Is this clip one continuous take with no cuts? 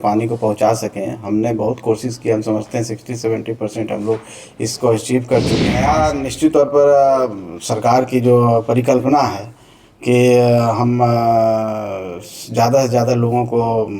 no; 1 cut; at 5.8 s

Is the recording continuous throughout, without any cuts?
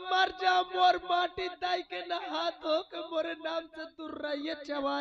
yes; 0 cuts

